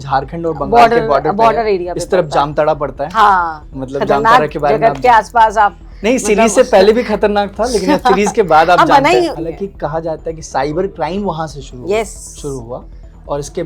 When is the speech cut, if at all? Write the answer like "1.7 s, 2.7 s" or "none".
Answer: 9.4 s